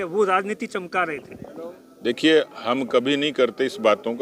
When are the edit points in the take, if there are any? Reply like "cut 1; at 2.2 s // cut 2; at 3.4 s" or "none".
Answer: none